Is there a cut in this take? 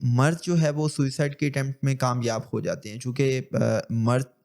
no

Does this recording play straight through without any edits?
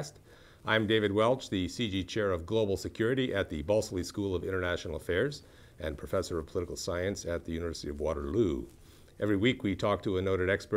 no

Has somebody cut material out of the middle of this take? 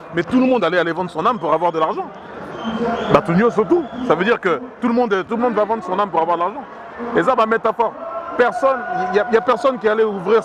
no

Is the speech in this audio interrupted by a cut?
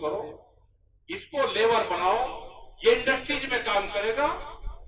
no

